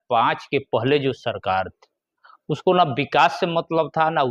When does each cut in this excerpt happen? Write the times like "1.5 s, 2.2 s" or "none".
none